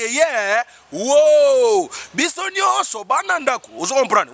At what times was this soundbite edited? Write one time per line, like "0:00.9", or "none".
none